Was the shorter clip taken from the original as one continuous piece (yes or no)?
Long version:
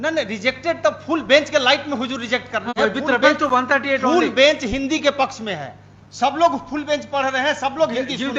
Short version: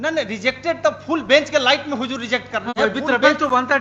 yes